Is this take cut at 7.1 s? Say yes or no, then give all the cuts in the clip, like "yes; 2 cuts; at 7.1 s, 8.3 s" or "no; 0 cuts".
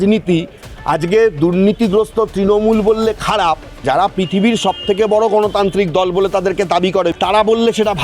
yes; 2 cuts; at 3.8 s, 7.1 s